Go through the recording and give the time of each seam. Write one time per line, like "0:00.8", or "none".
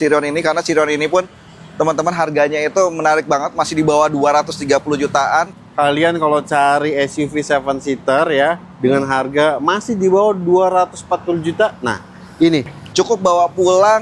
0:05.5
0:12.8